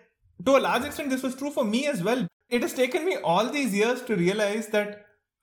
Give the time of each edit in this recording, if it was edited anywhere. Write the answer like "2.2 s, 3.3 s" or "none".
2.3 s